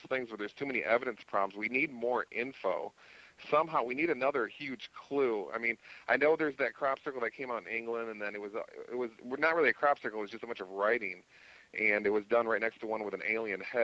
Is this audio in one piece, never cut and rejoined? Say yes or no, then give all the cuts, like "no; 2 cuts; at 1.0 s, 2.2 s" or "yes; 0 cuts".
no; 1 cut; at 6.4 s